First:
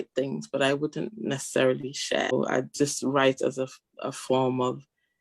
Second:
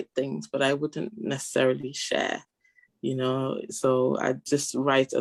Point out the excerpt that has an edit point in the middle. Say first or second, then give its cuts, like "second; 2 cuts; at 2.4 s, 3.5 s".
first; 1 cut; at 2.3 s